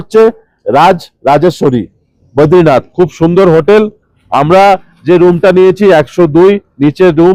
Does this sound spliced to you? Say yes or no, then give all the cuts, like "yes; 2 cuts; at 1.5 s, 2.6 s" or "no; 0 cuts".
no; 0 cuts